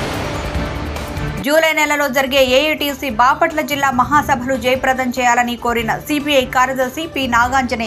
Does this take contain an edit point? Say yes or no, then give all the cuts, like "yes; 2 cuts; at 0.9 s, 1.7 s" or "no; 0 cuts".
no; 0 cuts